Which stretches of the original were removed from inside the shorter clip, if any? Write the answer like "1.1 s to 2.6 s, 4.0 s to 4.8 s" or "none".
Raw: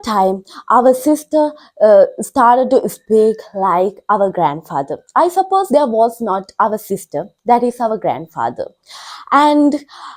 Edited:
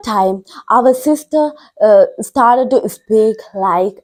none